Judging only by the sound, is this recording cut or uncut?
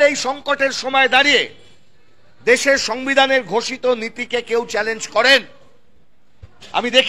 uncut